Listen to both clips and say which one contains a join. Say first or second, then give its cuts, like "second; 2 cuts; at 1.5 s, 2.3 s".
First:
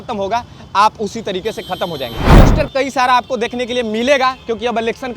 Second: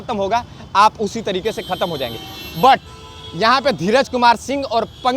first; 1 cut; at 2.4 s